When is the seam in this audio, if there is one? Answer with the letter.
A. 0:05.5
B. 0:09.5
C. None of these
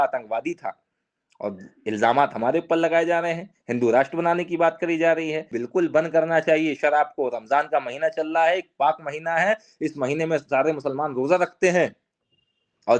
A